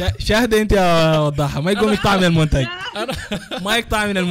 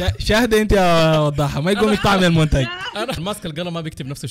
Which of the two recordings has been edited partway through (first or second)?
second